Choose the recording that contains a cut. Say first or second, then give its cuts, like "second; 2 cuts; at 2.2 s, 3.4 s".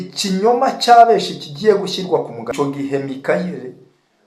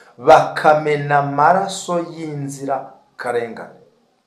first; 1 cut; at 2.5 s